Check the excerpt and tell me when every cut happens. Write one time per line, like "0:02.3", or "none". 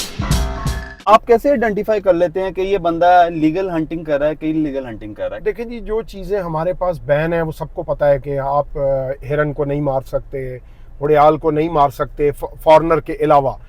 0:05.4